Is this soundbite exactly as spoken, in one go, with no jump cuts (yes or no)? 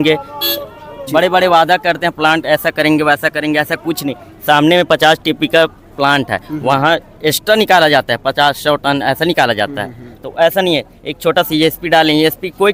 yes